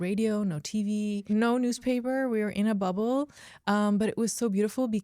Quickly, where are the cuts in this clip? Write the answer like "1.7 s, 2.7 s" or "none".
1.2 s

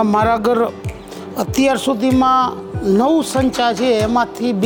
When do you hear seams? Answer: none

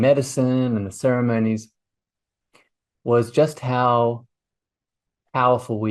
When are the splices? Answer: none

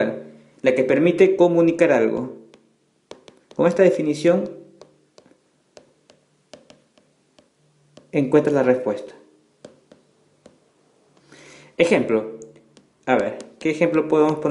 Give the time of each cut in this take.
none

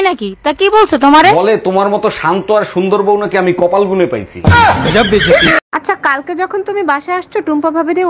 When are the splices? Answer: 5.6 s

